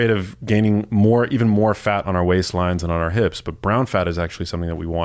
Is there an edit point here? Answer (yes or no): no